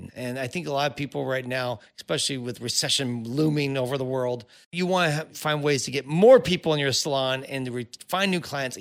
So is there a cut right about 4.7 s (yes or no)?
yes